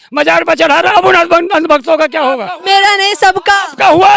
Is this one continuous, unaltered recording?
no; 1 cut; at 2.5 s

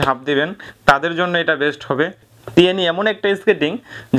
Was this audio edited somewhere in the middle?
yes; 1 cut; at 2.3 s

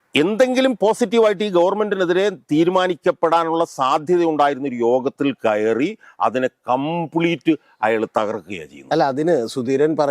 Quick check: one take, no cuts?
yes; 0 cuts

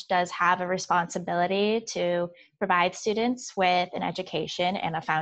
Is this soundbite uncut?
yes; 0 cuts

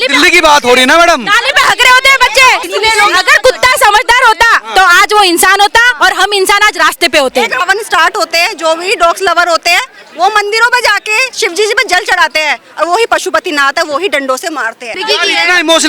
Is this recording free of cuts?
no; 3 cuts; at 2.7 s, 7.5 s, 15.0 s

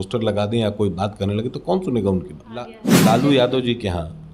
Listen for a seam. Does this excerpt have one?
yes; 1 cut; at 2.8 s

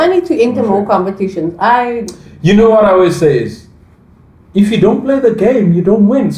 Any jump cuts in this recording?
no; 0 cuts

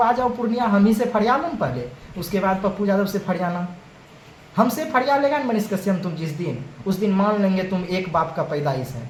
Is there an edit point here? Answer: no; 0 cuts

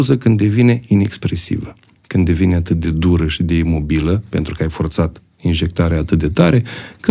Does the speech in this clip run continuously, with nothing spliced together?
yes; 0 cuts

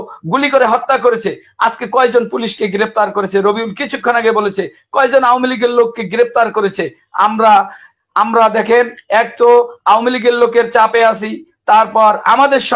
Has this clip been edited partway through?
no; 0 cuts

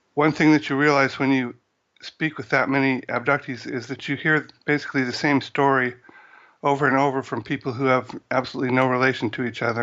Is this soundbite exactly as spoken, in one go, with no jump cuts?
yes; 0 cuts

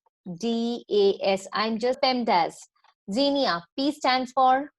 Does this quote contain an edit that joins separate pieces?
yes; 1 cut; at 2.0 s

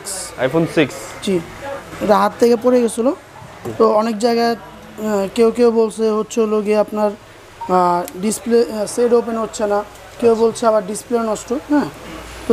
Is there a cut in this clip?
yes; 1 cut; at 1.9 s

